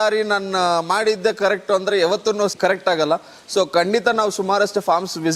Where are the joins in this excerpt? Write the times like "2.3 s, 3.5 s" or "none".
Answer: 2.5 s